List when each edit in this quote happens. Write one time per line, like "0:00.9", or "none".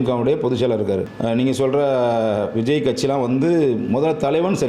0:01.1